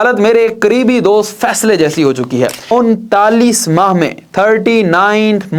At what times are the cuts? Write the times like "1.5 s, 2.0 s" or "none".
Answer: 2.7 s